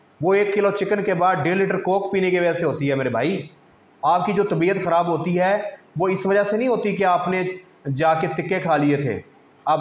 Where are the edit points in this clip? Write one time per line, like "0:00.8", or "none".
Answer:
none